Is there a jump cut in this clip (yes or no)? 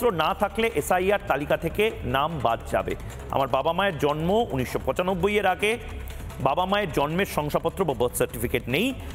no